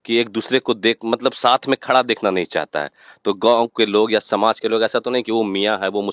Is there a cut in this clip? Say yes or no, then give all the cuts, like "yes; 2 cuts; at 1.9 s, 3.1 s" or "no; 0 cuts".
no; 0 cuts